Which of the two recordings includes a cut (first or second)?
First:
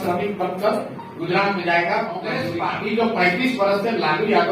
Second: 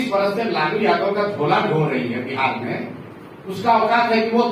first